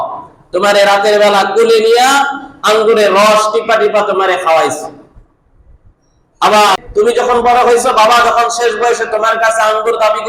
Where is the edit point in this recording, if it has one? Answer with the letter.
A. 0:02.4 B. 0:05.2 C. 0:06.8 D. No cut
C